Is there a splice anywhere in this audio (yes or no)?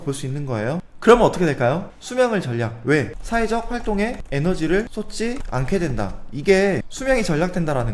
yes